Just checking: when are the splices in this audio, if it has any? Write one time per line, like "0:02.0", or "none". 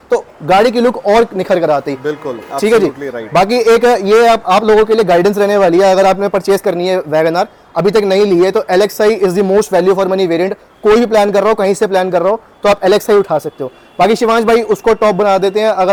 none